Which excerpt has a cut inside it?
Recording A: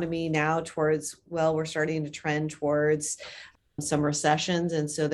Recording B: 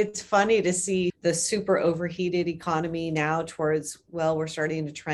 B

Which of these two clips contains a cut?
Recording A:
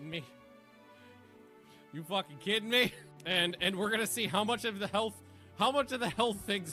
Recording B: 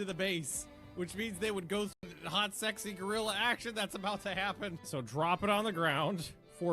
B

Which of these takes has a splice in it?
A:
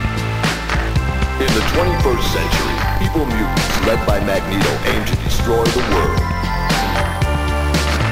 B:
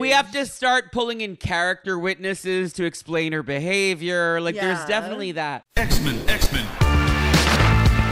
B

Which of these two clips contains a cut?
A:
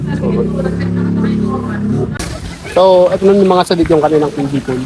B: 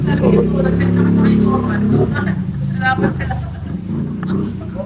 A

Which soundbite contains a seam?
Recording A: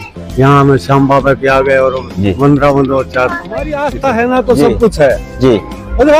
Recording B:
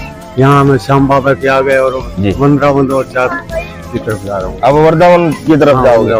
A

